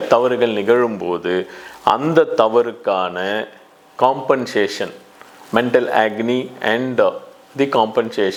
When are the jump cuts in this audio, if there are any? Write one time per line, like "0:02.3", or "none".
none